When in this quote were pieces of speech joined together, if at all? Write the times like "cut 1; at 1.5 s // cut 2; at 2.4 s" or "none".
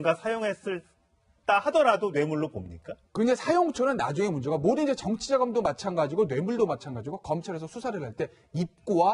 cut 1; at 2.6 s